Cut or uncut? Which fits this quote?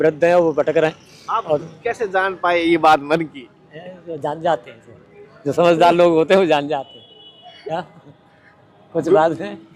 uncut